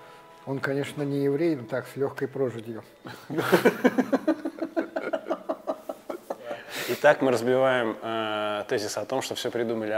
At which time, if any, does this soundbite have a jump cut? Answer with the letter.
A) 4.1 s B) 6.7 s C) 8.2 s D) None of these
B